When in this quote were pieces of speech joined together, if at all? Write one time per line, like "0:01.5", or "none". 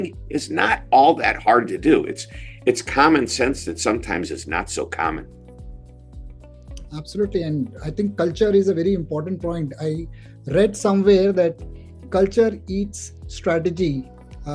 none